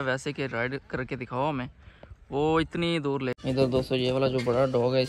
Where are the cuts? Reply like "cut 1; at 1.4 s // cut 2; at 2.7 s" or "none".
cut 1; at 3.4 s

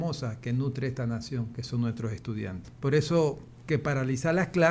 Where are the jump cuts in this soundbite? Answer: cut 1; at 2.6 s // cut 2; at 3.5 s

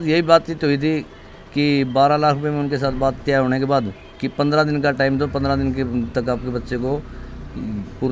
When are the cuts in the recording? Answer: none

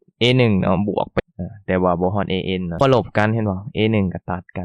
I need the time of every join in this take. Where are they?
cut 1; at 1.1 s // cut 2; at 2.8 s

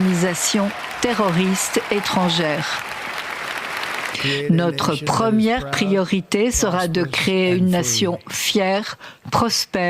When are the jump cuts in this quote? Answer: cut 1; at 4.2 s

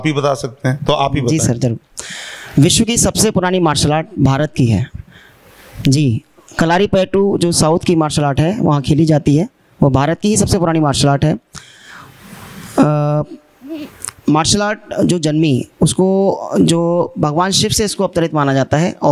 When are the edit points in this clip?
none

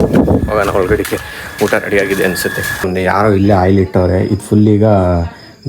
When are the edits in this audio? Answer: cut 1; at 2.8 s

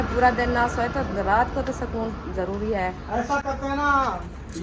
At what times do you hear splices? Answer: none

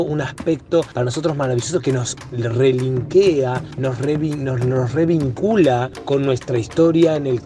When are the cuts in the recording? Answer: cut 1; at 0.9 s // cut 2; at 2.3 s // cut 3; at 3.7 s

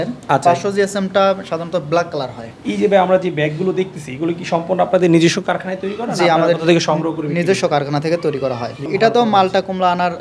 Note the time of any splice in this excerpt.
cut 1; at 2.5 s // cut 2; at 8.8 s

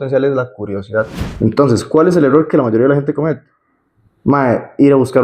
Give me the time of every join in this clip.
cut 1; at 1.2 s

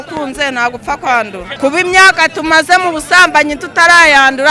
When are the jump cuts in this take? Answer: cut 1; at 1.4 s

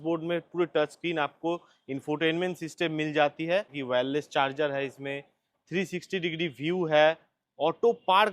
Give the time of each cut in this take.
cut 1; at 3.8 s

